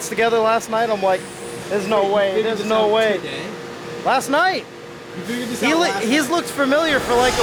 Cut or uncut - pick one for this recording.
uncut